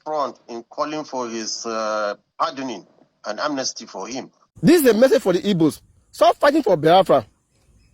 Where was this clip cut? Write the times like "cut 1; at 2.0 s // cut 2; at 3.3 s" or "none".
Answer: cut 1; at 4.4 s